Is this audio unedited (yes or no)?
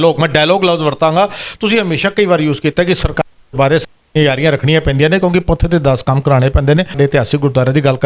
no